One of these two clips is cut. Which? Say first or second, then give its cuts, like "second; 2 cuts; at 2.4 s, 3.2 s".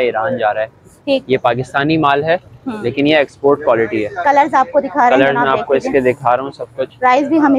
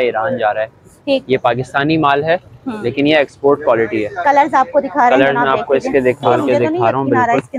second; 1 cut; at 6.3 s